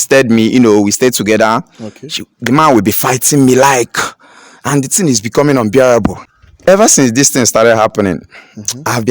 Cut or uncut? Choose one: cut